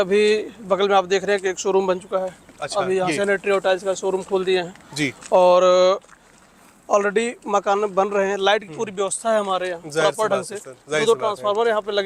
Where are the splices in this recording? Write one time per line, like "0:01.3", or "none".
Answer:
none